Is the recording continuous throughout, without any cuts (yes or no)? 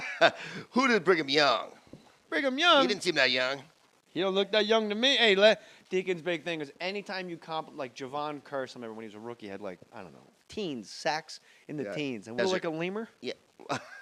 yes